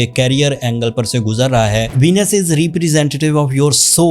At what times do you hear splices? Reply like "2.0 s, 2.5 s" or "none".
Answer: 1.9 s